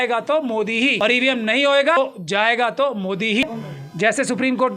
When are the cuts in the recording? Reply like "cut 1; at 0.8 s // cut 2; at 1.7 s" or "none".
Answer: cut 1; at 1.0 s // cut 2; at 2.0 s // cut 3; at 3.4 s

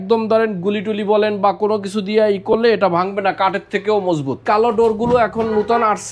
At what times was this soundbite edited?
cut 1; at 4.4 s

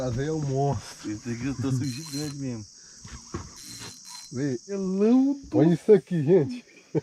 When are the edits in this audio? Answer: cut 1; at 4.7 s

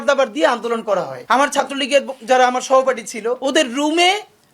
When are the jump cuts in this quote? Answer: cut 1; at 1.2 s // cut 2; at 3.4 s

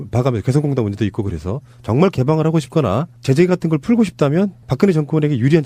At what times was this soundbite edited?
cut 1; at 1.7 s

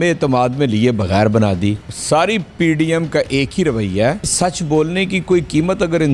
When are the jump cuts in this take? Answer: cut 1; at 1.9 s // cut 2; at 4.3 s

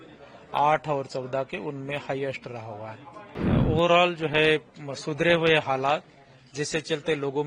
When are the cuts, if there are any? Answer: cut 1; at 3.3 s

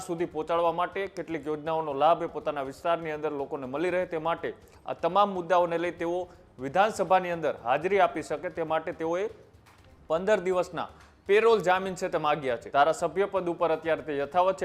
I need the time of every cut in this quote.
cut 1; at 12.6 s

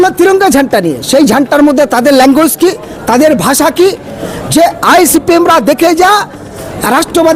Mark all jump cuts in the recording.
none

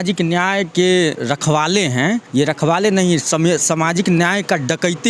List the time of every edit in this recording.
cut 1; at 1.2 s // cut 2; at 2.3 s

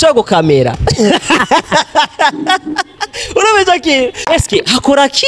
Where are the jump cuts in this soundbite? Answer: cut 1; at 4.3 s

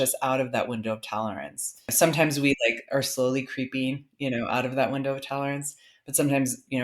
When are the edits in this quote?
cut 1; at 1.9 s

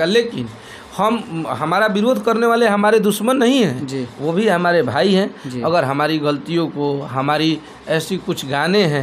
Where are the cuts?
none

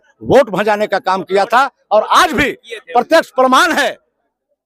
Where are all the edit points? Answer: none

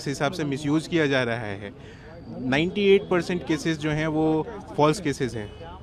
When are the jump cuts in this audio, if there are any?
none

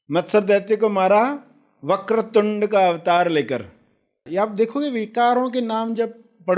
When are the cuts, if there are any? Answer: cut 1; at 4.2 s

